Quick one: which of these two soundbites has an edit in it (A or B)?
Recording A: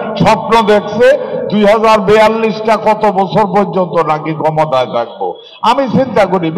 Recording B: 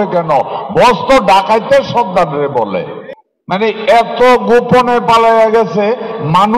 B